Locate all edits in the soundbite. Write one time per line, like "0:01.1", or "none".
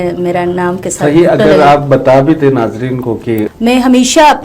0:03.5